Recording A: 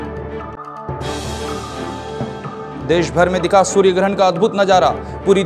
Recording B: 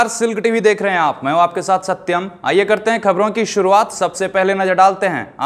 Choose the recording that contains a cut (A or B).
A